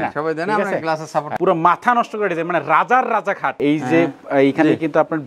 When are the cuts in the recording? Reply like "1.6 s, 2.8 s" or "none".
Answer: 1.3 s, 3.6 s